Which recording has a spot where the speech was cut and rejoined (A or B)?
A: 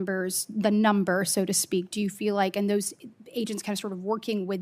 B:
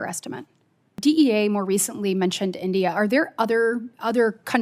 B